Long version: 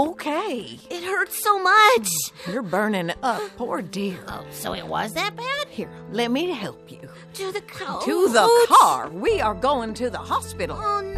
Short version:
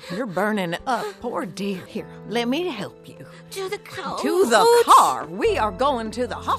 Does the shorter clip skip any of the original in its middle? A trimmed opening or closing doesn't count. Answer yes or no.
yes